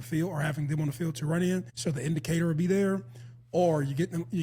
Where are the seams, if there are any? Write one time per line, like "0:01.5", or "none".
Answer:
0:01.7